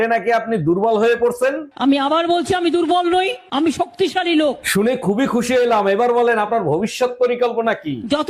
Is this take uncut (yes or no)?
yes